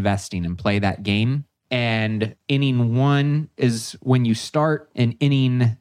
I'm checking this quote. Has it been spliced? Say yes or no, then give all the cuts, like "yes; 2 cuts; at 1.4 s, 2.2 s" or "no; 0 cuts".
yes; 3 cuts; at 1.5 s, 2.4 s, 4.9 s